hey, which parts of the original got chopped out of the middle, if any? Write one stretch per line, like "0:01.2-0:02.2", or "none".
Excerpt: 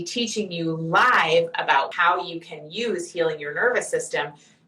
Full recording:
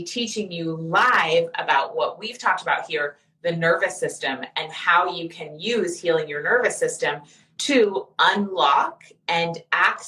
0:01.9-0:04.8